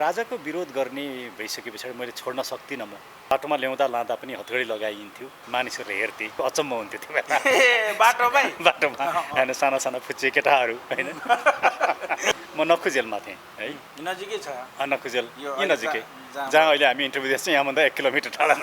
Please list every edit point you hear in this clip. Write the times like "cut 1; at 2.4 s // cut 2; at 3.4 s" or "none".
cut 1; at 3.3 s // cut 2; at 5.3 s // cut 3; at 6.4 s // cut 4; at 12.3 s // cut 5; at 13.9 s